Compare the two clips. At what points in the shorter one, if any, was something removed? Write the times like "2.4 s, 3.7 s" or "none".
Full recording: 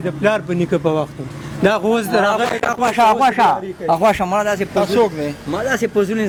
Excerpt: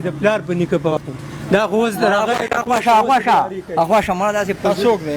0.9 s